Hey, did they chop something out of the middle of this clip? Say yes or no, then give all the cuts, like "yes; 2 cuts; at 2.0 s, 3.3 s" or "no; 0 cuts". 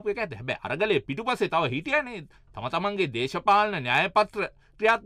no; 0 cuts